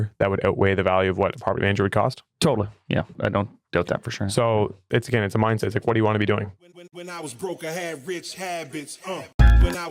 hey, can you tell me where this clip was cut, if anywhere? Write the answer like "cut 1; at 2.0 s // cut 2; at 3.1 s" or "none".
cut 1; at 3.2 s // cut 2; at 4.9 s // cut 3; at 6.6 s